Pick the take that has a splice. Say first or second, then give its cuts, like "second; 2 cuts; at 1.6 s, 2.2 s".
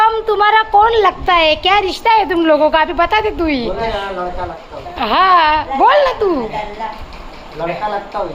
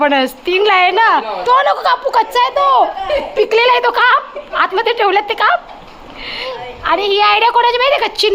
second; 2 cuts; at 1.3 s, 6.5 s